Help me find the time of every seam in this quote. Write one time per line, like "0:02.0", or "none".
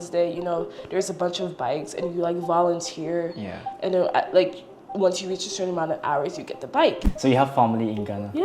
0:07.0